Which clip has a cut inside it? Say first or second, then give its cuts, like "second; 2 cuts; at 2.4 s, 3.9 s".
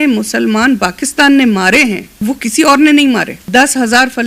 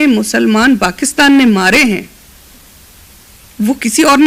first; 2 cuts; at 2.1 s, 3.4 s